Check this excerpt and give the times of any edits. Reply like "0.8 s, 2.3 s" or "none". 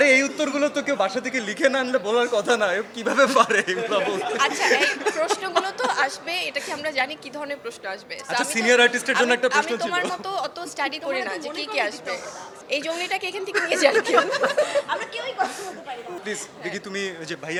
none